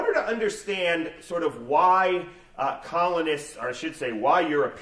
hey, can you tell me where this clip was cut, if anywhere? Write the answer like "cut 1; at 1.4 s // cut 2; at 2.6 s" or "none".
cut 1; at 1.1 s

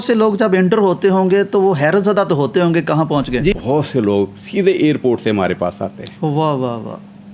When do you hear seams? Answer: cut 1; at 3.5 s

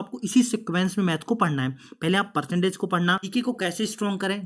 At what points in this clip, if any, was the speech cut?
cut 1; at 3.2 s

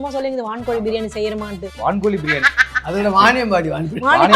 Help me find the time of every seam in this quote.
cut 1; at 1.6 s

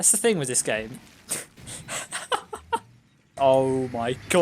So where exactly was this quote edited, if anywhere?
cut 1; at 3.3 s

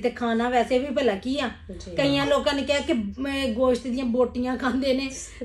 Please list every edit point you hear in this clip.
none

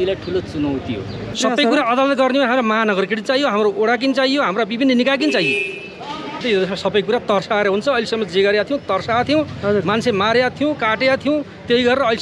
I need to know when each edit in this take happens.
cut 1; at 1.4 s // cut 2; at 6.4 s

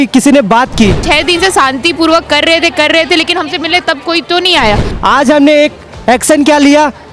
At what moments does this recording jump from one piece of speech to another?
cut 1; at 1.0 s // cut 2; at 4.9 s

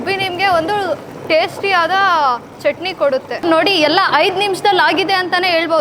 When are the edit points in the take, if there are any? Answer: cut 1; at 3.4 s

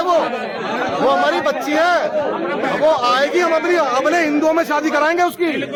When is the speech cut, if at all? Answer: none

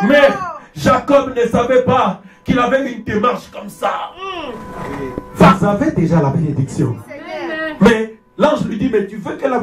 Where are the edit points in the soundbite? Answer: cut 1; at 5.5 s

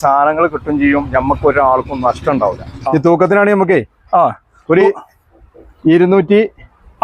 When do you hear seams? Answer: cut 1; at 2.7 s

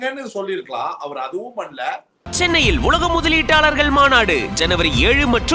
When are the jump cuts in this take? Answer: cut 1; at 2.2 s

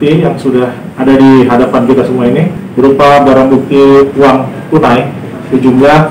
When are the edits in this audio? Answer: cut 1; at 2.6 s

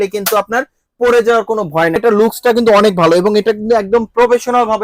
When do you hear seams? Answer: cut 1; at 2.0 s

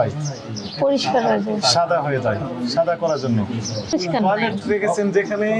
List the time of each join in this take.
cut 1; at 3.9 s

